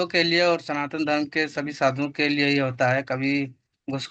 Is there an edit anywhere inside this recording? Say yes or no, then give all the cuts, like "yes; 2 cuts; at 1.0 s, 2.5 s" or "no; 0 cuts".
no; 0 cuts